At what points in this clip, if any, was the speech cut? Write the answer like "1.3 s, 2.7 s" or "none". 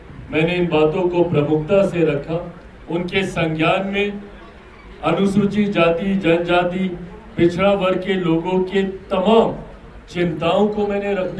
none